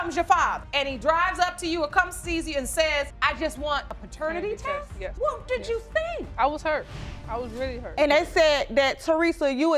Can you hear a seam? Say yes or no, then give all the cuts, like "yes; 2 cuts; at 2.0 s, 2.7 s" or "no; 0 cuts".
yes; 1 cut; at 7.9 s